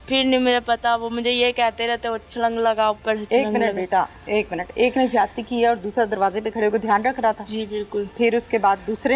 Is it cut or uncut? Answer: uncut